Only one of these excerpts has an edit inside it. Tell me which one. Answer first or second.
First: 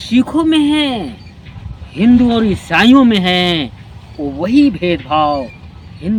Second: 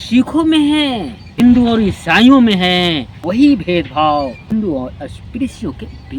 second